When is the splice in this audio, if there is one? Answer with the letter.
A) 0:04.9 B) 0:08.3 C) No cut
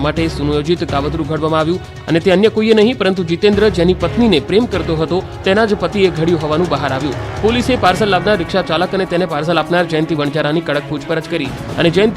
C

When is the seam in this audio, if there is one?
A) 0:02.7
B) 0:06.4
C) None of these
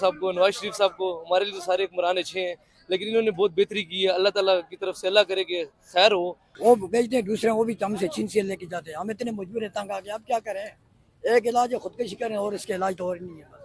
B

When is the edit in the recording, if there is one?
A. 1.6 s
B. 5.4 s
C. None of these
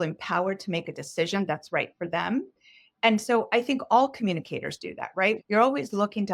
B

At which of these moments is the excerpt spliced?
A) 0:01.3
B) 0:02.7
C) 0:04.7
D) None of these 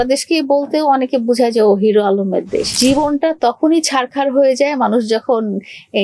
B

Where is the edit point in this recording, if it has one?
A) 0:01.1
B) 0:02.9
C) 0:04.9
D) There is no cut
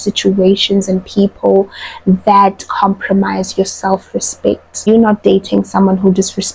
C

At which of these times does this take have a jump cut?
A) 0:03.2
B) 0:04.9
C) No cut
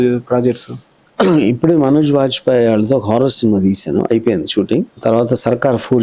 B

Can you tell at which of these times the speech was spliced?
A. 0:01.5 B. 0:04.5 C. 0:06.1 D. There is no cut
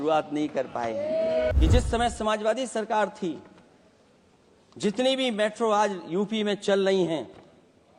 A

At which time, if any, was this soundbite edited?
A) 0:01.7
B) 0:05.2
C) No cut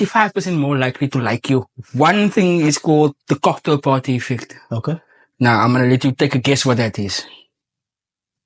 A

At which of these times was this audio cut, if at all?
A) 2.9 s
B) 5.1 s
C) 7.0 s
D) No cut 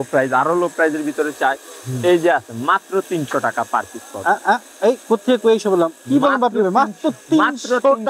D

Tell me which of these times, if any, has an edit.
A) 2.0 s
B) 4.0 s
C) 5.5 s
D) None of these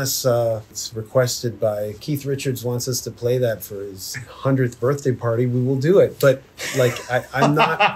A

